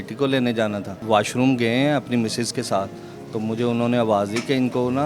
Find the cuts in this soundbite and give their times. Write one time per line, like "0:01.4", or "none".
0:01.0